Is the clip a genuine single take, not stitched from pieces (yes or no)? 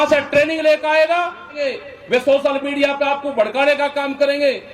no